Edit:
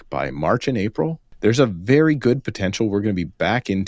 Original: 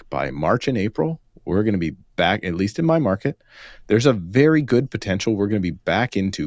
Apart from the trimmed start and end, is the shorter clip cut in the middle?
yes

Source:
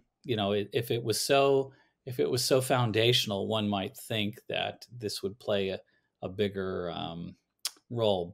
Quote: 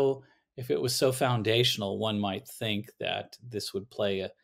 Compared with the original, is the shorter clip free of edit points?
yes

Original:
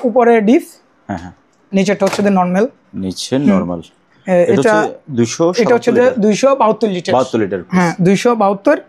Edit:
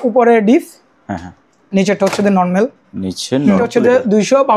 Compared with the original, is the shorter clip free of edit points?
no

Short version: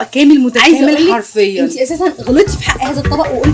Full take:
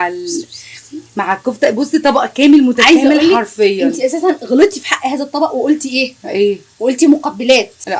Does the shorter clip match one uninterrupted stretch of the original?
yes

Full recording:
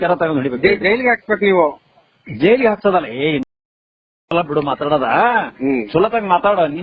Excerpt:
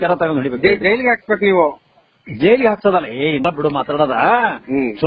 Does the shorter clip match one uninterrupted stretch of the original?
no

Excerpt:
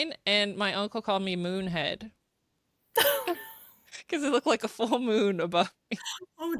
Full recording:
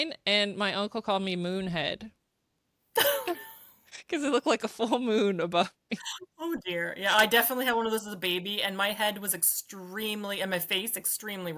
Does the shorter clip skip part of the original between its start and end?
no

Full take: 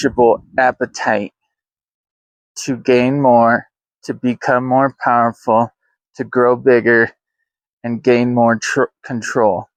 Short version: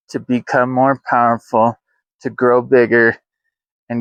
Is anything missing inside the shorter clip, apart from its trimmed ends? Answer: no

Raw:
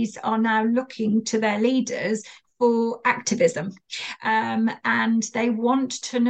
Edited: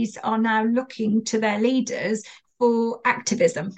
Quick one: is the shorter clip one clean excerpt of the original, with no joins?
yes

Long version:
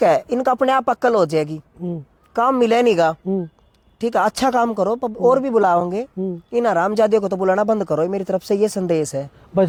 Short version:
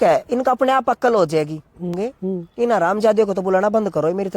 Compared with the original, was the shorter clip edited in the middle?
yes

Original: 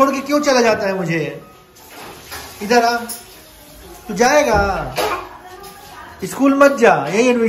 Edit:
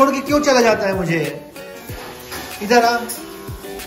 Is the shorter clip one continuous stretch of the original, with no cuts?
yes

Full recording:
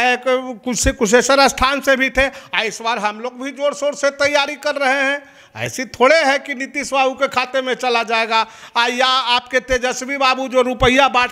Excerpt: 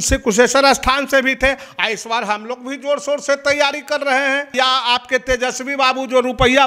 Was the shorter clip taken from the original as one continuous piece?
no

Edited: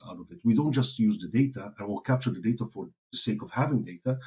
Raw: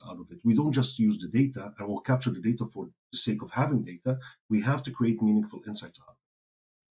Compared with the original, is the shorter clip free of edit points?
yes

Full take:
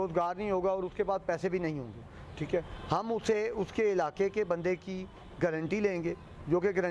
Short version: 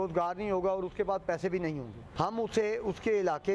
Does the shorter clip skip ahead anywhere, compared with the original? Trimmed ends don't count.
yes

